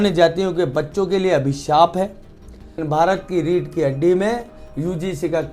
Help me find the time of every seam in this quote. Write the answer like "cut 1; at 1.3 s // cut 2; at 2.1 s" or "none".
cut 1; at 2.8 s